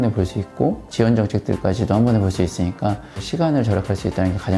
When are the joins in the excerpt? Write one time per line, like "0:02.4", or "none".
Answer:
0:03.2